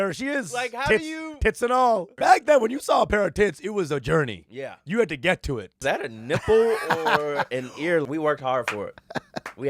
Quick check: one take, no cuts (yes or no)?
no